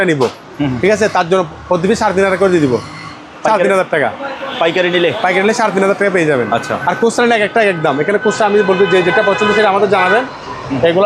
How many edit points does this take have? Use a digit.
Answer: 0